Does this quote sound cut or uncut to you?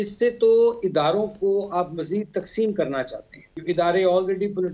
cut